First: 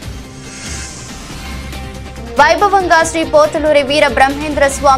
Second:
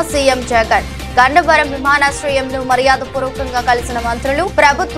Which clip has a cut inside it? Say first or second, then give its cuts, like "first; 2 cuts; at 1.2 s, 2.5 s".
first; 1 cut; at 1.0 s